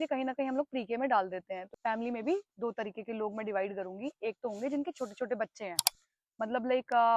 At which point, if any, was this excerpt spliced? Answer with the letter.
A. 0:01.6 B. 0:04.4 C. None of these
A